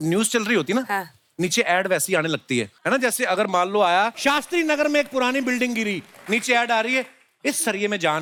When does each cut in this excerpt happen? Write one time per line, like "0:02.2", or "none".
none